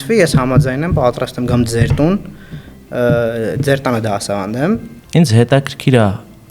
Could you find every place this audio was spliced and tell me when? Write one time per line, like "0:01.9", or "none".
0:04.9